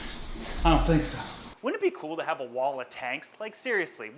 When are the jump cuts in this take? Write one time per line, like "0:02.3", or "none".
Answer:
0:01.4